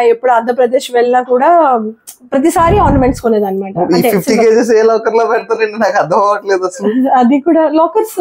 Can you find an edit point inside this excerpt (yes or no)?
no